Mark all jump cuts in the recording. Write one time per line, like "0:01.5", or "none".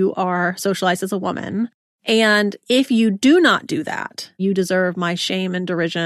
0:02.2
0:04.4